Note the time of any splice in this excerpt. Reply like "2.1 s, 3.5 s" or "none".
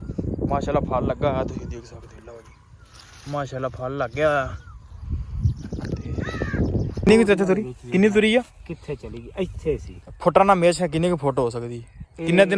6.9 s